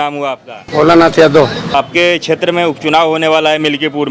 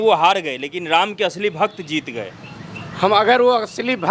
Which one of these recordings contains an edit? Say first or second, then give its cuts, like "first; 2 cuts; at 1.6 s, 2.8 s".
first; 1 cut; at 1.7 s